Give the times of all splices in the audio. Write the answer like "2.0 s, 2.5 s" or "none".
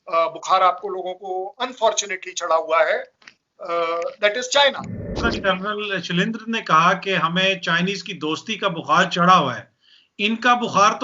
5.1 s